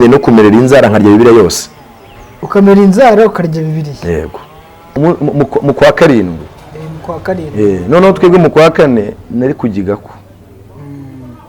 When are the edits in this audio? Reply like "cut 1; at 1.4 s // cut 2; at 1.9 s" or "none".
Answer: cut 1; at 4.9 s

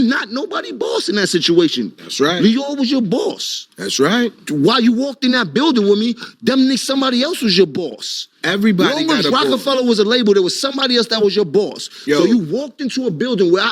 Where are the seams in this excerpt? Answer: none

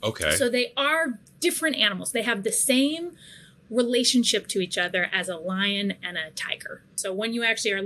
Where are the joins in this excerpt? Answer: cut 1; at 7.0 s

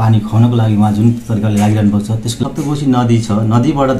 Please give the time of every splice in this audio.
cut 1; at 2.4 s

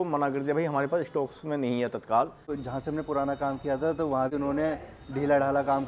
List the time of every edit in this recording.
cut 1; at 2.6 s // cut 2; at 4.3 s

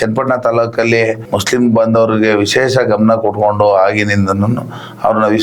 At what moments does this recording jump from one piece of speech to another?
cut 1; at 1.2 s

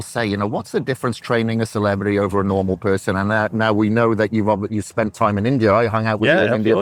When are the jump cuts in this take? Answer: none

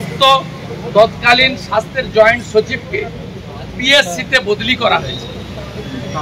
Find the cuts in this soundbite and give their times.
none

